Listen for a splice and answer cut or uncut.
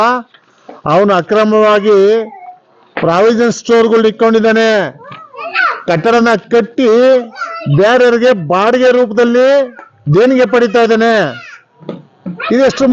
uncut